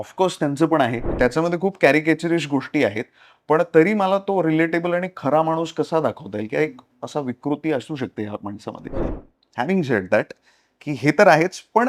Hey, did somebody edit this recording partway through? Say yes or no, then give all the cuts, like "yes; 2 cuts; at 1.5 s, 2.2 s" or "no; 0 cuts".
yes; 2 cuts; at 1.1 s, 9.2 s